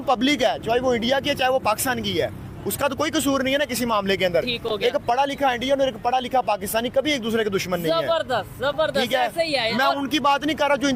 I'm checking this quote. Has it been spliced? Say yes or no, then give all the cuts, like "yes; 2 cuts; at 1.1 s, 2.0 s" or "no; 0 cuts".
no; 0 cuts